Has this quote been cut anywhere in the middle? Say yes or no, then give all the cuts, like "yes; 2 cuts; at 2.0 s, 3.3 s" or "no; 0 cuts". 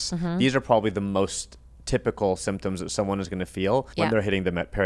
yes; 1 cut; at 3.9 s